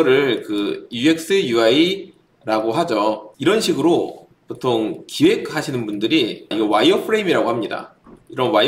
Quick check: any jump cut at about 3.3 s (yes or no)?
yes